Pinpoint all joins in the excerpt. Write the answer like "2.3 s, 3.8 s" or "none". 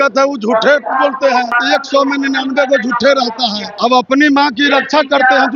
1.6 s, 3.6 s